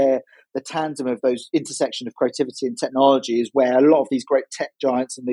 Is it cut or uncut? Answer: uncut